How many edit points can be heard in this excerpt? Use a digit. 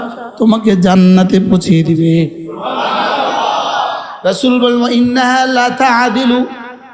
0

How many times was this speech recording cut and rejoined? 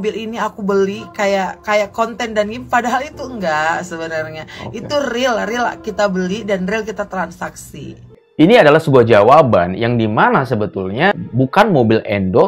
2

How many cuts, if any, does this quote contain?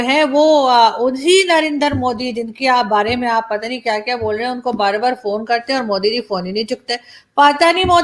0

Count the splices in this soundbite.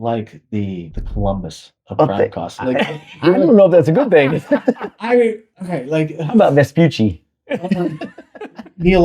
1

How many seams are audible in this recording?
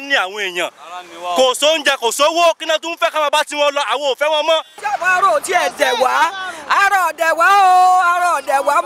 1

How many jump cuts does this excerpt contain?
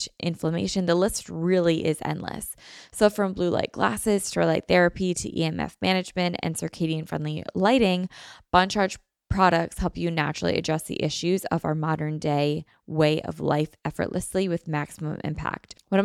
0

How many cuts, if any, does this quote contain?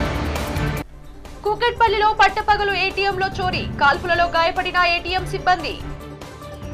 1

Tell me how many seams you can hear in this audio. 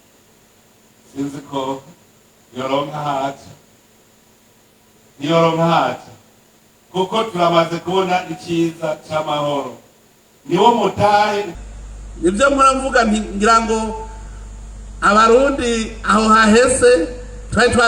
1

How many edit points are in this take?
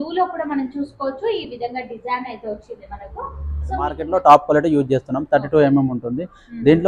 1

